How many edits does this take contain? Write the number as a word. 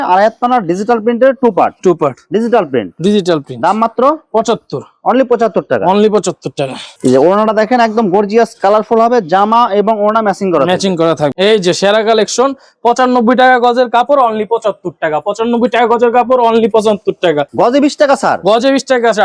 zero